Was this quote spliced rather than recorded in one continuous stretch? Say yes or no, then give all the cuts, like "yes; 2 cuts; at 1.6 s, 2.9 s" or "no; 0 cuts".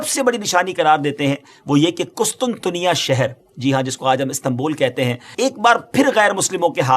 yes; 1 cut; at 5.2 s